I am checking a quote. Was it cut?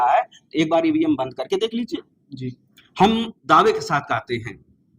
no; 0 cuts

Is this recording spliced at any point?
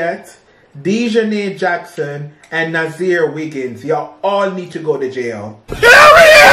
no; 0 cuts

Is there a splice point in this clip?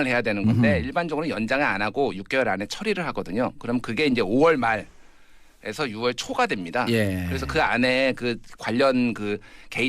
yes; 1 cut; at 3.9 s

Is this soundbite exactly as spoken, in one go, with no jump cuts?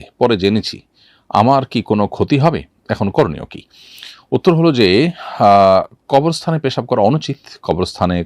yes; 0 cuts

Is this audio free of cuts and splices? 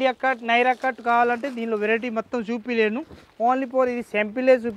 yes; 0 cuts

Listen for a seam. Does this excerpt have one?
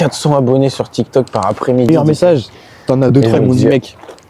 yes; 1 cut; at 1.9 s

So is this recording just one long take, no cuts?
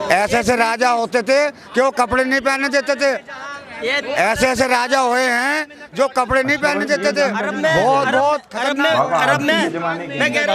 yes; 0 cuts

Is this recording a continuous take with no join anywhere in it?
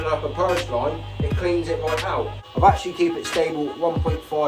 no; 1 cut; at 2.4 s

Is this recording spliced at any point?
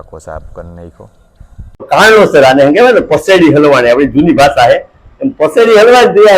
yes; 1 cut; at 1.8 s

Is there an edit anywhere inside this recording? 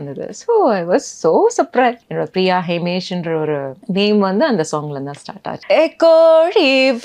yes; 3 cuts; at 2.0 s, 3.8 s, 5.5 s

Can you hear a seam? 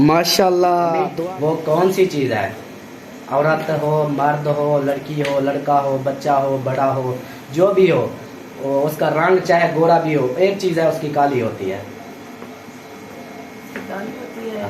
yes; 1 cut; at 1.1 s

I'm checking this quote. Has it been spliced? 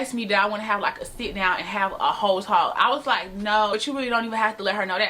yes; 1 cut; at 3.7 s

